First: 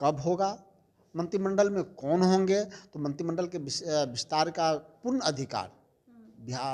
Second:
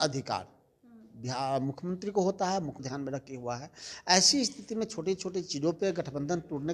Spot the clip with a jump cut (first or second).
second